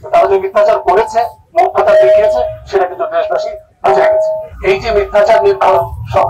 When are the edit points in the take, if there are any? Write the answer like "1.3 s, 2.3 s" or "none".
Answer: 4.5 s